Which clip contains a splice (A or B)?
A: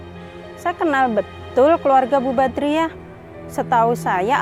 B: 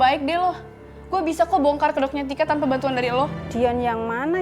B